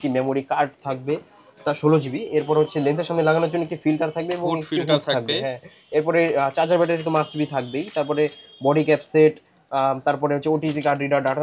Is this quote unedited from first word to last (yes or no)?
yes